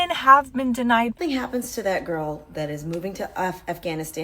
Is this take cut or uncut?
cut